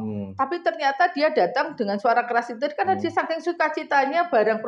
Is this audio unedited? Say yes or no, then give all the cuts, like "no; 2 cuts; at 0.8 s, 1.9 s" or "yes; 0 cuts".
yes; 0 cuts